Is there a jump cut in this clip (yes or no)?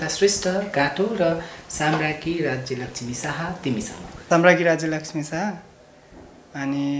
yes